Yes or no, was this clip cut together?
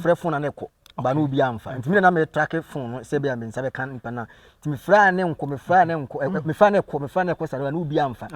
no